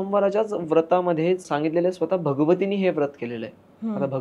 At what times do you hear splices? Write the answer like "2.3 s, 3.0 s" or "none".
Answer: 1.5 s